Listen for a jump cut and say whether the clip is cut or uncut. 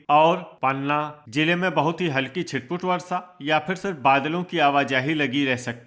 cut